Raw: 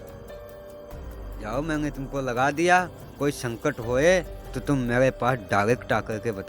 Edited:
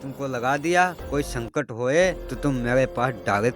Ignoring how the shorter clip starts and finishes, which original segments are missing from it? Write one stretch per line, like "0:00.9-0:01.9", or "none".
0:02.9-0:03.1
0:04.4-0:04.5

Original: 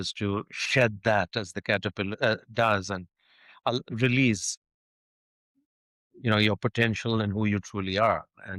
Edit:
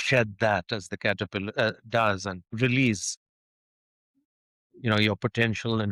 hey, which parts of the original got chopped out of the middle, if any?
0:03.1-0:03.9

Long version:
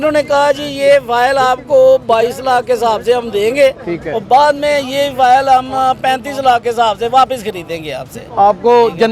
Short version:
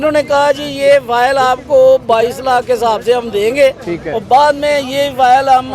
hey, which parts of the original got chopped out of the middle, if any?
none

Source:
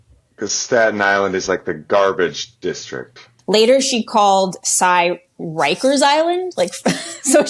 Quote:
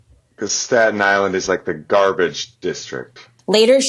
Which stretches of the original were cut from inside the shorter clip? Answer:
none

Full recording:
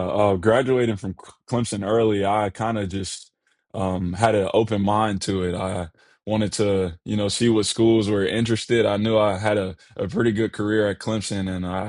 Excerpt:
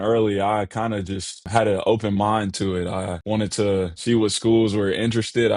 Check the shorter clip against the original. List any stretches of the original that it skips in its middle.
0:03.3-0:04.1
0:05.8-0:06.2
0:07.0-0:07.3

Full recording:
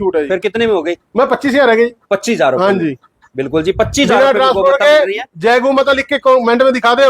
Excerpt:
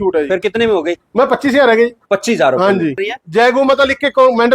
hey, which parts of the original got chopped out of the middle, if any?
0:03.1-0:05.2

